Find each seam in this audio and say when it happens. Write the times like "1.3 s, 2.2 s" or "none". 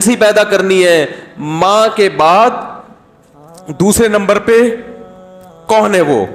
none